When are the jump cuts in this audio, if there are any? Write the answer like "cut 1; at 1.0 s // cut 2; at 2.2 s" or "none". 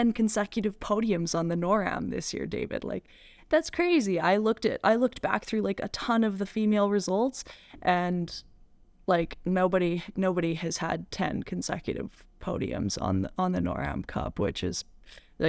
none